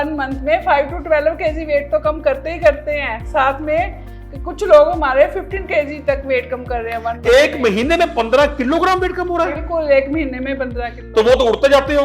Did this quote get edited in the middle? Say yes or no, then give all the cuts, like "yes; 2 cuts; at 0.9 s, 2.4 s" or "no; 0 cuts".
no; 0 cuts